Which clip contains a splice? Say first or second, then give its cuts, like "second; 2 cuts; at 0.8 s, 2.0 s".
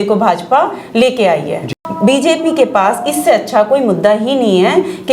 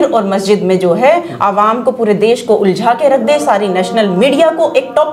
first; 1 cut; at 1.8 s